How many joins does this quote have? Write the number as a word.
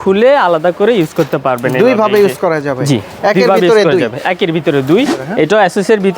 one